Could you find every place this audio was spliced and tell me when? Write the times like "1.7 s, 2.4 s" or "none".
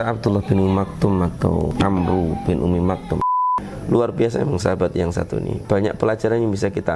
1.7 s, 3.3 s, 5.5 s